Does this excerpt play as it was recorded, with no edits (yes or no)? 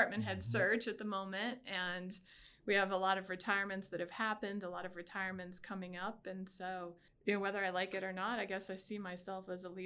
yes